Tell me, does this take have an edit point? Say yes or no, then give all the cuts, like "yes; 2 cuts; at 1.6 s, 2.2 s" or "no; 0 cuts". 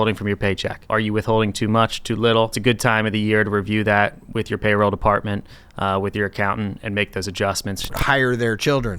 yes; 3 cuts; at 0.8 s, 2.6 s, 8.0 s